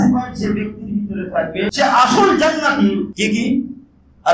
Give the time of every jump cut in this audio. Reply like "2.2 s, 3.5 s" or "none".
1.7 s, 3.1 s